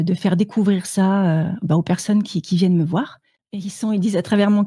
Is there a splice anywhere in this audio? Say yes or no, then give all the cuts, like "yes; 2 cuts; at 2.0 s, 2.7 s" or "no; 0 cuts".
yes; 1 cut; at 3.7 s